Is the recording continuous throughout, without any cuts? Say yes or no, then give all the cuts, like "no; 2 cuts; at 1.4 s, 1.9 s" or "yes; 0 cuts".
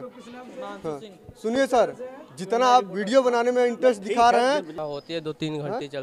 no; 1 cut; at 4.7 s